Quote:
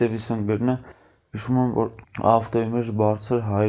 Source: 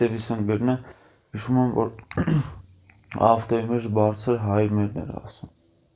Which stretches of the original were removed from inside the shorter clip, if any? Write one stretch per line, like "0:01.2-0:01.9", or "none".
0:02.0-0:03.0